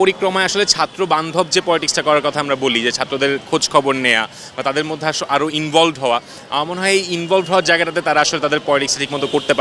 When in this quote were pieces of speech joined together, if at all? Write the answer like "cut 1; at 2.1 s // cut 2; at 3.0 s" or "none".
none